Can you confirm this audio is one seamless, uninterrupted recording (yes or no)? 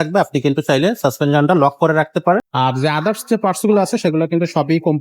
no